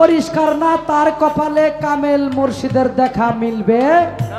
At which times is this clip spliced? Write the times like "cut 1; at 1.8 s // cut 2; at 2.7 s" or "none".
none

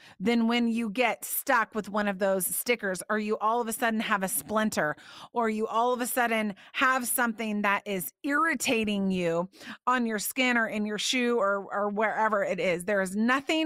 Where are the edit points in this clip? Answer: none

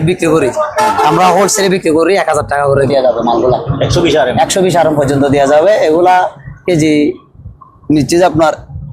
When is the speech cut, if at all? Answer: cut 1; at 2.9 s

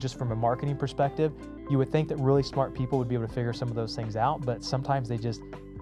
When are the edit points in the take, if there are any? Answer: none

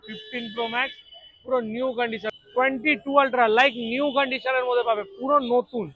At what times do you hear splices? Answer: cut 1; at 2.3 s

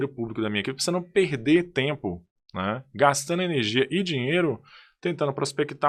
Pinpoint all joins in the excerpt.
none

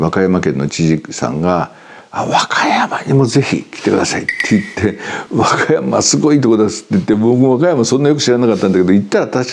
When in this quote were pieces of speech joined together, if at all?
none

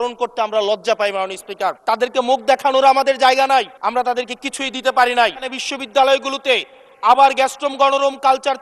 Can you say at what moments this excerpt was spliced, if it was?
cut 1; at 1.8 s // cut 2; at 3.7 s // cut 3; at 5.6 s

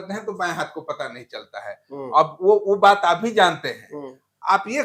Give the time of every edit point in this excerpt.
none

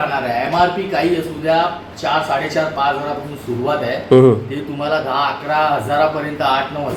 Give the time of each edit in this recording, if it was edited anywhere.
none

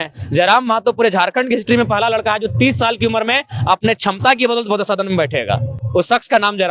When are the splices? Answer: none

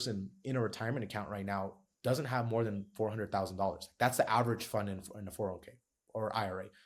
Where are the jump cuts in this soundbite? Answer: none

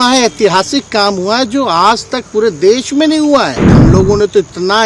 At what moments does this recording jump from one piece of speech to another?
cut 1; at 3.7 s

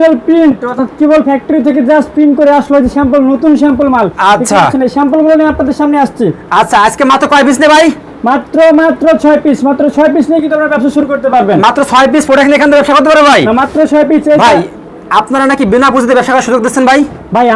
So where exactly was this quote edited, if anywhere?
none

